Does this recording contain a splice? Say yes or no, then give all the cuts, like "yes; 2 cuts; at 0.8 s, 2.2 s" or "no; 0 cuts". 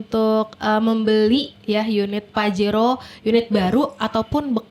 no; 0 cuts